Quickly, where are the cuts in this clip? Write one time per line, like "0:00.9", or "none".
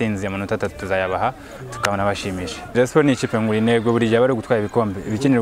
0:02.7